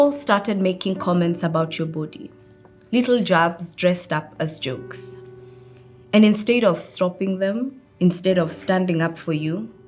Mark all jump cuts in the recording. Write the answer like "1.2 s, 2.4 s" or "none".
none